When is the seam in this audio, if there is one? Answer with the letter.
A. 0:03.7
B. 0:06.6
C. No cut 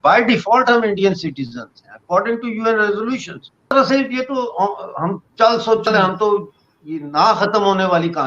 A